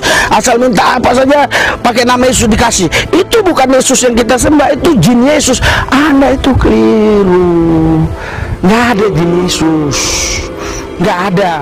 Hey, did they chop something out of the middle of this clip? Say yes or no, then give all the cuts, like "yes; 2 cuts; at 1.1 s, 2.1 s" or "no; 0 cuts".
no; 0 cuts